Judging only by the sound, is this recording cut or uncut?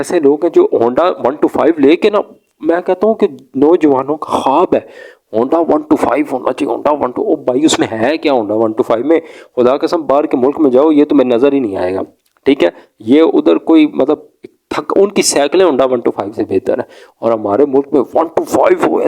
uncut